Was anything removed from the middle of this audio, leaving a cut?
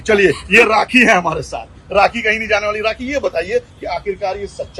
no; 0 cuts

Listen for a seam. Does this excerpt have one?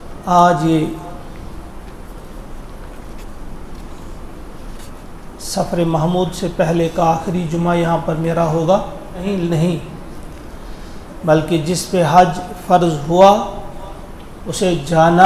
yes; 1 cut; at 9.2 s

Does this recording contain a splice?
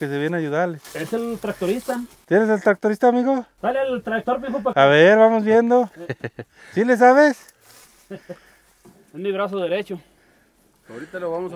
no; 0 cuts

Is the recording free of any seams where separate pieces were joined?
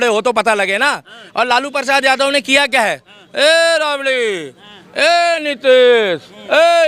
yes; 0 cuts

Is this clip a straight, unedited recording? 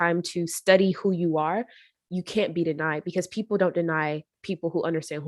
yes; 0 cuts

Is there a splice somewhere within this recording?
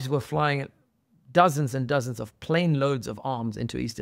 no; 0 cuts

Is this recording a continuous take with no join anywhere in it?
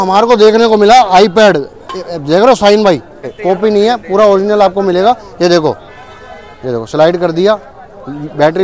no; 1 cut; at 3.4 s

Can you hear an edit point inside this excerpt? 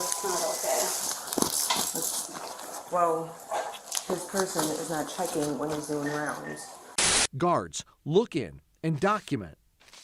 yes; 1 cut; at 7.0 s

